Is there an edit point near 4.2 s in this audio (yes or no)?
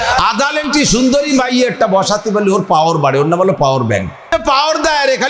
yes